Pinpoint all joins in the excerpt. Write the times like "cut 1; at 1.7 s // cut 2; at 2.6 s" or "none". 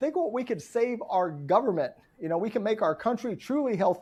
none